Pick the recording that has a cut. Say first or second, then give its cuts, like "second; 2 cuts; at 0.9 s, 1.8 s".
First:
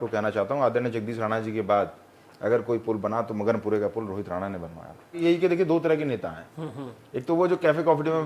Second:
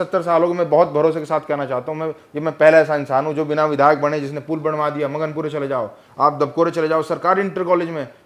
first; 1 cut; at 5.2 s